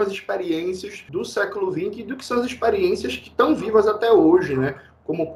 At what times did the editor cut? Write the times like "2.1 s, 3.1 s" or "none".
0.9 s

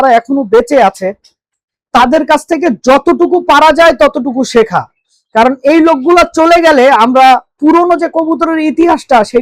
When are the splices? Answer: none

